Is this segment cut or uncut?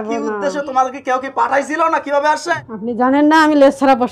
cut